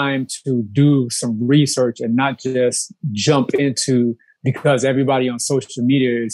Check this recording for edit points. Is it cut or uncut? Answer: uncut